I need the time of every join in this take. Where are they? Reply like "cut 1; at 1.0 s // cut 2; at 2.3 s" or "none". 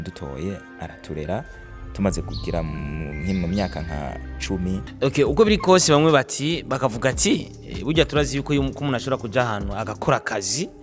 cut 1; at 4.9 s

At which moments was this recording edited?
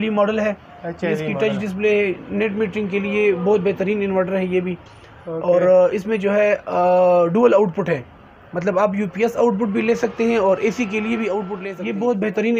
cut 1; at 11.6 s

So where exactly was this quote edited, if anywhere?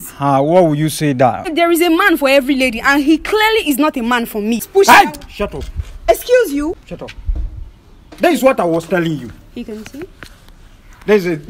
cut 1; at 1.5 s // cut 2; at 4.6 s // cut 3; at 6.8 s

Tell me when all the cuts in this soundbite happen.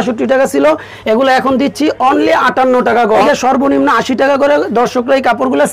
cut 1; at 3.2 s

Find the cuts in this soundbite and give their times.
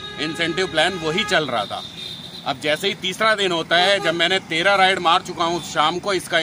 none

